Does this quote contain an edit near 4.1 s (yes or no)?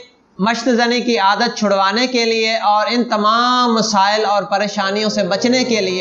no